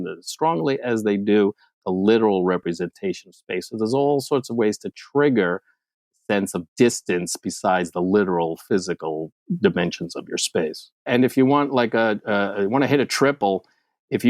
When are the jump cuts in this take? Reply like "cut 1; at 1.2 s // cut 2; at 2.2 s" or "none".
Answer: cut 1; at 11.1 s